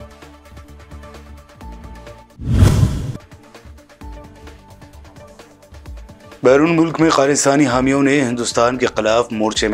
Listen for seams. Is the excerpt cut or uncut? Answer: uncut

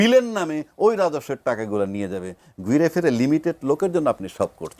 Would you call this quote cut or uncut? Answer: uncut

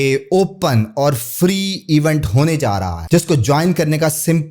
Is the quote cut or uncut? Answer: cut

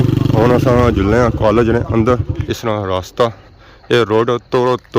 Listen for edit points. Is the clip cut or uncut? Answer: cut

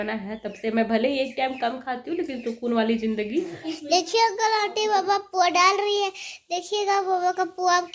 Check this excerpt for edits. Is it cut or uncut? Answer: cut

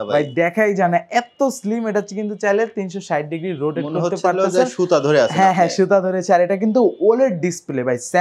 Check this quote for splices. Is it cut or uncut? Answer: uncut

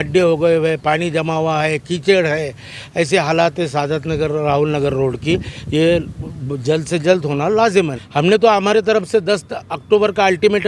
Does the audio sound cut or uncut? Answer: cut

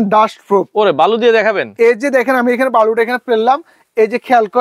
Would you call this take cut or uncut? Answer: uncut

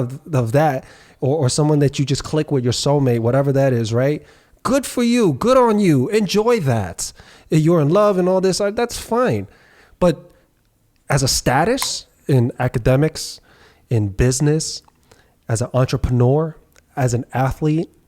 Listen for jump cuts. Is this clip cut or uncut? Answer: cut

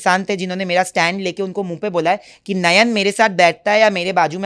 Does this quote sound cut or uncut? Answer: uncut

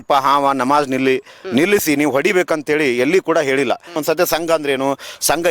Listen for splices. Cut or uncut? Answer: cut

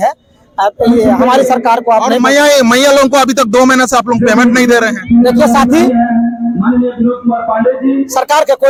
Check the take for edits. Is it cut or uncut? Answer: uncut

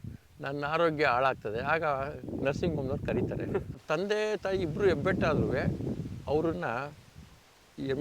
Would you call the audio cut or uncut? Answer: cut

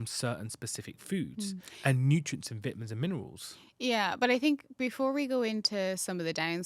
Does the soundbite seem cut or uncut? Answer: uncut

